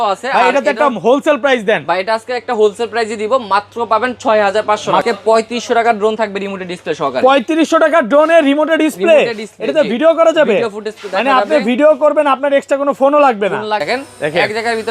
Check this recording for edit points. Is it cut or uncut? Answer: cut